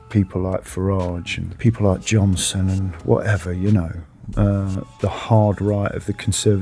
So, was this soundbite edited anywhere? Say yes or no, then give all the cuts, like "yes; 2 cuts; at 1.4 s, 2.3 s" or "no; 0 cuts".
yes; 1 cut; at 1.5 s